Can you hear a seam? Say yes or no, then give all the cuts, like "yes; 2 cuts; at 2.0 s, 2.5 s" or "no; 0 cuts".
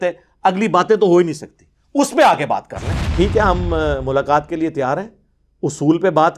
yes; 1 cut; at 3.1 s